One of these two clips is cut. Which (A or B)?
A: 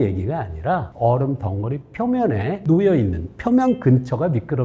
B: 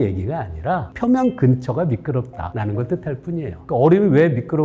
B